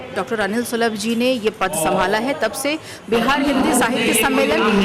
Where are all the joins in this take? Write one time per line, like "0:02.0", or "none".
none